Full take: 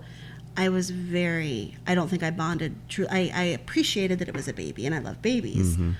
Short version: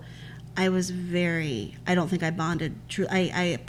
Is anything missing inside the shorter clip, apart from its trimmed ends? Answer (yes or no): no